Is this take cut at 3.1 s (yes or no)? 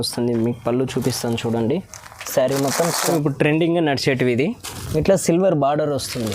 yes